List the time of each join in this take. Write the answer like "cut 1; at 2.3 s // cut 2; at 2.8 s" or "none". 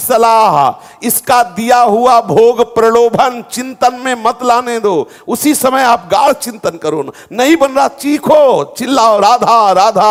none